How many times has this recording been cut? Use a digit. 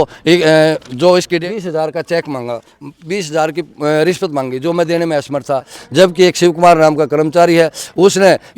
2